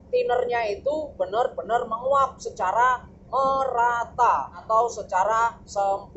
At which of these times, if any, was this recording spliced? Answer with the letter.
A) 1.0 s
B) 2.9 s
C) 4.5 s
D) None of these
C